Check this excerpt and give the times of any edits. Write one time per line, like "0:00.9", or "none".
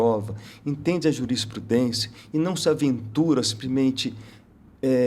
none